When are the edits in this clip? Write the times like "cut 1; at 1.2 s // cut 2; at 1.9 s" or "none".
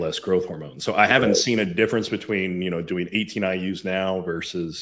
none